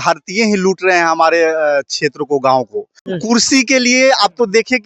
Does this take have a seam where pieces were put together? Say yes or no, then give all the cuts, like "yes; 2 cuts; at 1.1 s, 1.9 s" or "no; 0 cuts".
yes; 1 cut; at 3.0 s